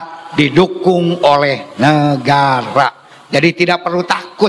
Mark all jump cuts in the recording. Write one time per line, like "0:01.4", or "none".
none